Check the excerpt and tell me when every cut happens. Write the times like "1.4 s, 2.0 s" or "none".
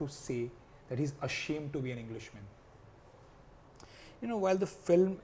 none